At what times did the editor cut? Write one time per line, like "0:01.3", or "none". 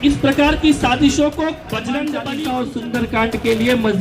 0:02.4

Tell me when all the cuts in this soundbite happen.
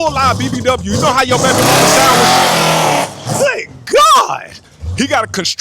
0:04.5

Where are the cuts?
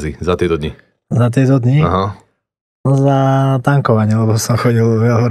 none

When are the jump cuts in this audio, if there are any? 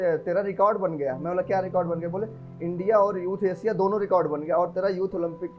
none

